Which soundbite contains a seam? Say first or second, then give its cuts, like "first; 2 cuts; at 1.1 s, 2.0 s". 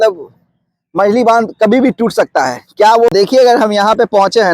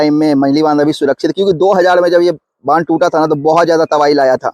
first; 1 cut; at 3.1 s